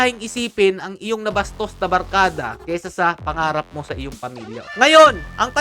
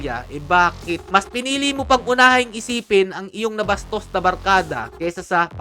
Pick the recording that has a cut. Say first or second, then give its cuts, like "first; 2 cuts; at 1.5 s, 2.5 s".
first; 1 cut; at 4.6 s